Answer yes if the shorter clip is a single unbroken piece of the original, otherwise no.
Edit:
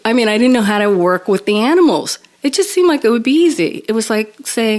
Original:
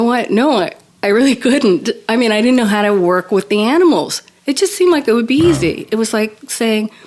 yes